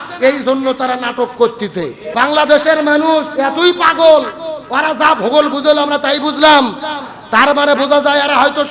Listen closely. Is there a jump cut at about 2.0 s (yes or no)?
yes